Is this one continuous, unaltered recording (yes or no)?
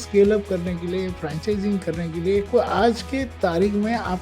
no